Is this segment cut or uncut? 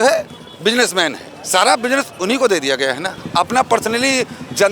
cut